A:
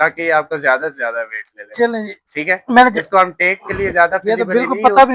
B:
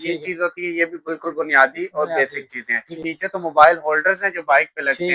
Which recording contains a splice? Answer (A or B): B